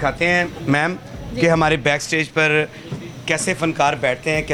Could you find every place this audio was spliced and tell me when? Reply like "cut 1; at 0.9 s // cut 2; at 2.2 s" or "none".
none